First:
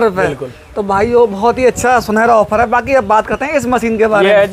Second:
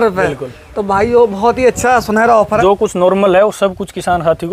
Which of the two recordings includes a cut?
second; 1 cut; at 2.6 s

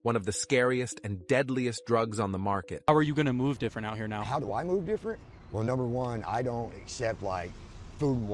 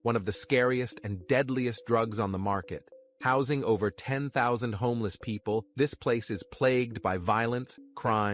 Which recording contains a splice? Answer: first; 1 cut; at 2.8 s

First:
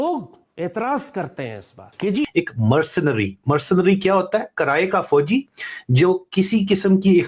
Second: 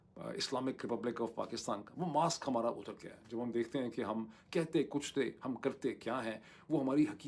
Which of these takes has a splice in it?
first; 1 cut; at 2.3 s

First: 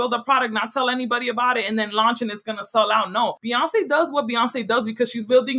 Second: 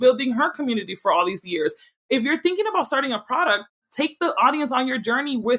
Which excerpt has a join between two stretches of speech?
first; 1 cut; at 3.4 s

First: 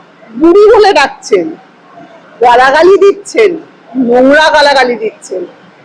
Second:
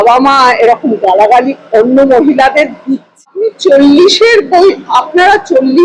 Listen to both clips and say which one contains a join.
second; 1 cut; at 3.2 s

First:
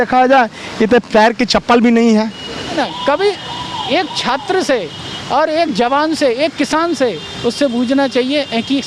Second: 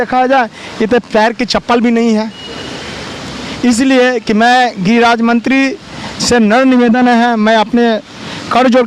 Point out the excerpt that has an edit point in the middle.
first; 1 cut; at 2.8 s

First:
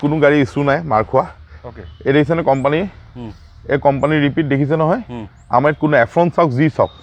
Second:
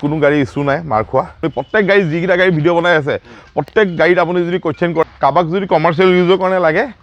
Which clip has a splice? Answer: second; 2 cuts; at 1.4 s, 5.0 s

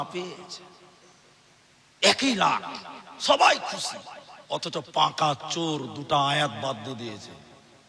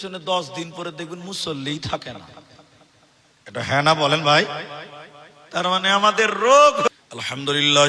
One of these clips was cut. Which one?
second; 1 cut; at 6.9 s

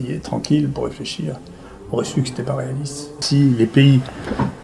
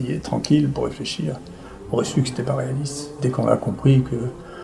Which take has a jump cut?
first; 1 cut; at 3.2 s

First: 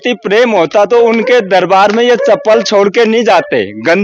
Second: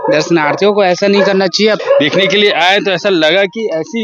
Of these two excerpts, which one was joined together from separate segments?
second; 1 cut; at 1.8 s

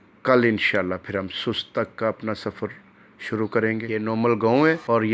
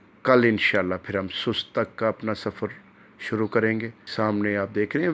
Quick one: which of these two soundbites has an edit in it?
first; 1 cut; at 3.9 s

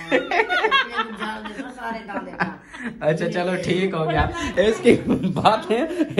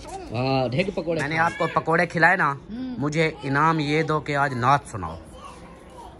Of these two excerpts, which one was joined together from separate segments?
second; 1 cut; at 1.3 s

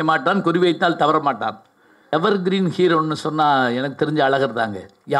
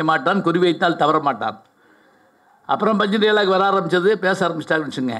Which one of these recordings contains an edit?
first; 1 cut; at 2.1 s

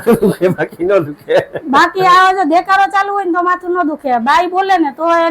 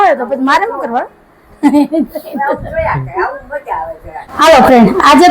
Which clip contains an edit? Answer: second; 1 cut; at 4.2 s

